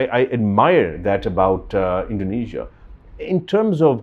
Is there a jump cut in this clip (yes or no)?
no